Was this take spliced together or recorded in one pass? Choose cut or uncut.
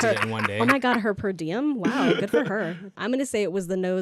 cut